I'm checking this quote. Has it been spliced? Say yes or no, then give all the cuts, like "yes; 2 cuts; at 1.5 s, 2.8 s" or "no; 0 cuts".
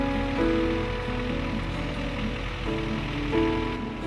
no; 0 cuts